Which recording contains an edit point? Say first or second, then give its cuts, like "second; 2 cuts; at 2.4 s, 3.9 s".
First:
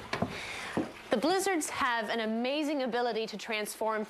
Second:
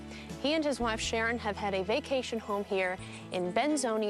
first; 1 cut; at 1.7 s